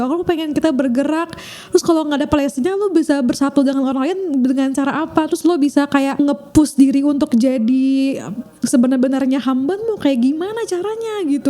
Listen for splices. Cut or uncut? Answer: cut